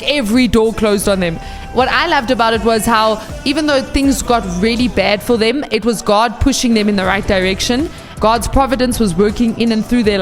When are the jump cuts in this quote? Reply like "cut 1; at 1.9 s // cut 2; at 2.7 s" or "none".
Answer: cut 1; at 1.6 s // cut 2; at 3.4 s // cut 3; at 8.0 s